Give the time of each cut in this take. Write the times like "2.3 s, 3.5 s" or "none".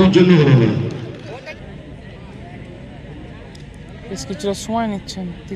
1.5 s

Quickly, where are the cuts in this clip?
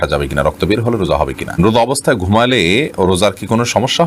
1.6 s

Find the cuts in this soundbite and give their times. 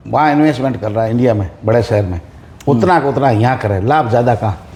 none

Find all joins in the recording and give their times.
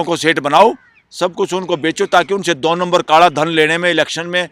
none

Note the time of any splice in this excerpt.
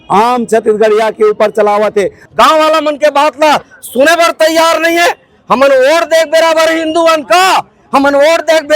2.2 s

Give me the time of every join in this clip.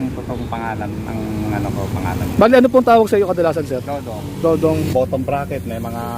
4.9 s

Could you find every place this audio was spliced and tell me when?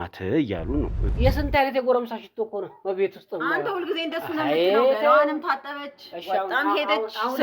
1.0 s

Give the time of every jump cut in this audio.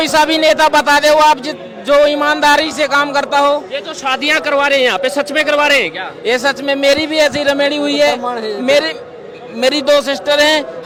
none

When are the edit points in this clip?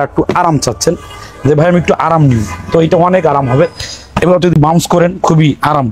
none

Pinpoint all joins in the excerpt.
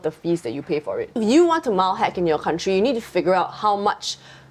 none

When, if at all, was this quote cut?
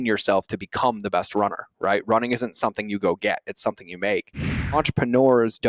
4.8 s

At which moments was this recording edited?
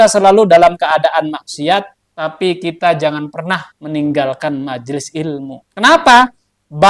2.0 s, 3.7 s, 5.6 s

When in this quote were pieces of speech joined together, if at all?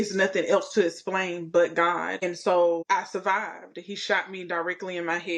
2.2 s, 2.8 s

